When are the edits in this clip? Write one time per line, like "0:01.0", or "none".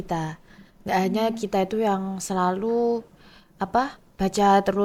none